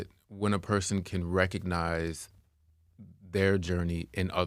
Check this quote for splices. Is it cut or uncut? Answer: uncut